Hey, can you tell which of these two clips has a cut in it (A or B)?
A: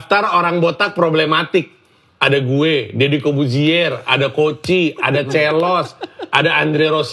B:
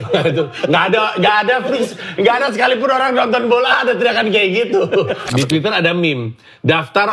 B